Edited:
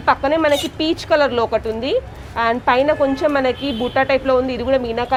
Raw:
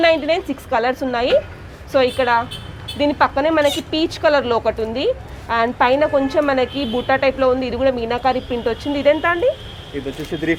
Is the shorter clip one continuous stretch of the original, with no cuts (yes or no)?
yes